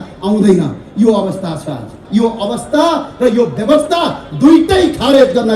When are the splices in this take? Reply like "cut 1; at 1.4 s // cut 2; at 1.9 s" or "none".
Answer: cut 1; at 2.0 s